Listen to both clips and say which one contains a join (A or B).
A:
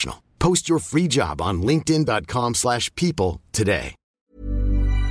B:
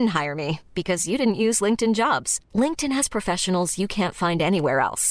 A